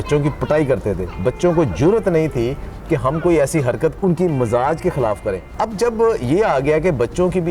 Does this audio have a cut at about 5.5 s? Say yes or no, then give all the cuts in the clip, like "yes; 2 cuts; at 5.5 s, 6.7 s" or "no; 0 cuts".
yes; 2 cuts; at 4.0 s, 5.5 s